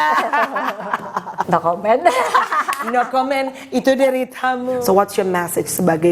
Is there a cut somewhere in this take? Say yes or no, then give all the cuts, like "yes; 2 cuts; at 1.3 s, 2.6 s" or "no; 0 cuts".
yes; 2 cuts; at 1.4 s, 4.7 s